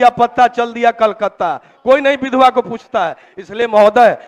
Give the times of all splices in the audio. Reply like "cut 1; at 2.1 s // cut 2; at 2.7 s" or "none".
none